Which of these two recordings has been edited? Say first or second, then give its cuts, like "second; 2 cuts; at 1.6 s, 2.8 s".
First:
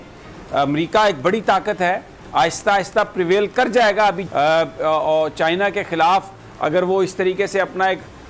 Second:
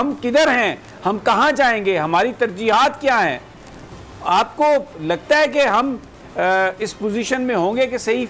first; 1 cut; at 4.2 s